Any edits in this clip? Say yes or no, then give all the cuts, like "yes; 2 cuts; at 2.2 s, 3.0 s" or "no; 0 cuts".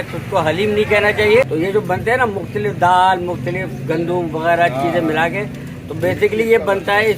yes; 1 cut; at 1.5 s